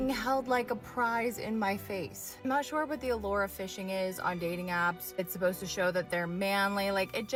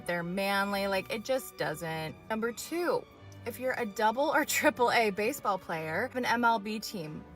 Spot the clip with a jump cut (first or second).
second